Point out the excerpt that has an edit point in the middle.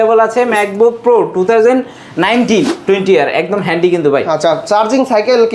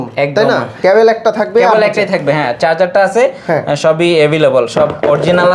first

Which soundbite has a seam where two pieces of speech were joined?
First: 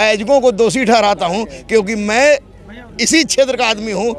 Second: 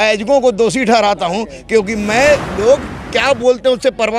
second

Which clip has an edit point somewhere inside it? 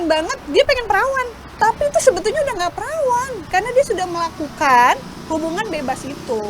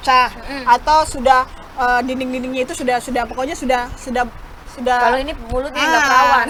first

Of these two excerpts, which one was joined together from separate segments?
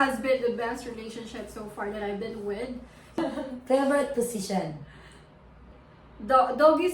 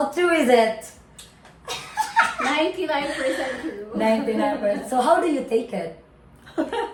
first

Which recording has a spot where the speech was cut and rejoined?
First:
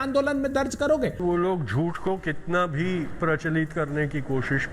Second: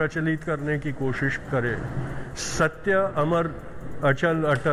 first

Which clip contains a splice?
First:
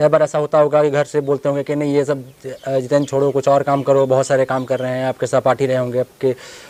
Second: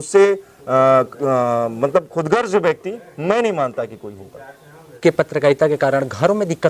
second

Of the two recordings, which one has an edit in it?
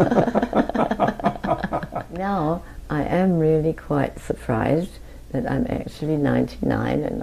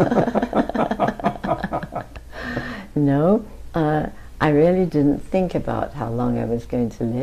first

